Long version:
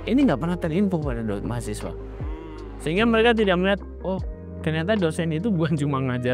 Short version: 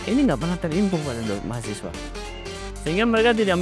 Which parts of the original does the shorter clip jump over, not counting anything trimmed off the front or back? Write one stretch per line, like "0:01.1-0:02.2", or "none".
none